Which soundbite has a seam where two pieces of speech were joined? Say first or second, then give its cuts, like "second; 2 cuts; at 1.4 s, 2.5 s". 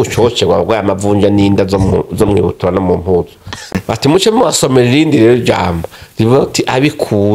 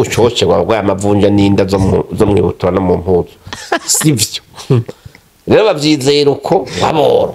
first; 1 cut; at 3.8 s